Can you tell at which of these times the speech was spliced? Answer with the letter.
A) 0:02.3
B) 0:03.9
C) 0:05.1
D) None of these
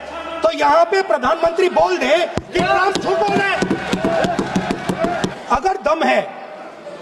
C